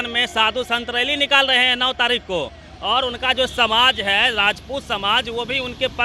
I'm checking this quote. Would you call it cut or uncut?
uncut